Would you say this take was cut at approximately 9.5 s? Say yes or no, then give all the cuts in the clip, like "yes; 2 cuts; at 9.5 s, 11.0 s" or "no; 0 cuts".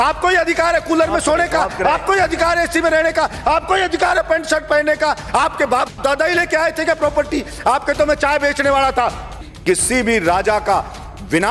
yes; 1 cut; at 9.5 s